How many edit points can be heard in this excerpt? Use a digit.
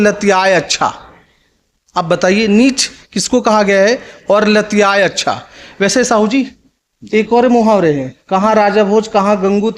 0